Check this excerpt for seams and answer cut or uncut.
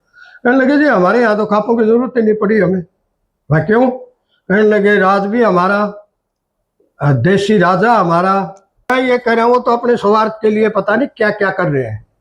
cut